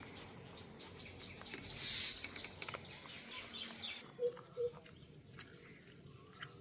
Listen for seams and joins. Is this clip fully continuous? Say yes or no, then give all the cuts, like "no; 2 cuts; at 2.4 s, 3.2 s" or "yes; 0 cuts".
no; 1 cut; at 4.1 s